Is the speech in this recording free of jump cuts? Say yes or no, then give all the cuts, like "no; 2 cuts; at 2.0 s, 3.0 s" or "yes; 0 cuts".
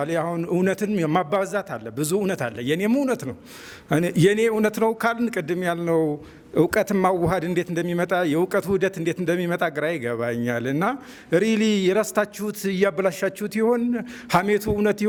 yes; 0 cuts